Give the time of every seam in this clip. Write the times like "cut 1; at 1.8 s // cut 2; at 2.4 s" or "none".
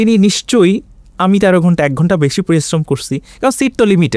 none